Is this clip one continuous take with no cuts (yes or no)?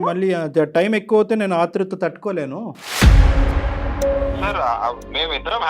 no